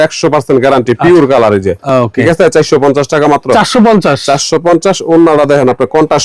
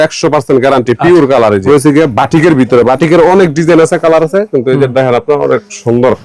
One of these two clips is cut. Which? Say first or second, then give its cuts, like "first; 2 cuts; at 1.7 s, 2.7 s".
second; 1 cut; at 1.6 s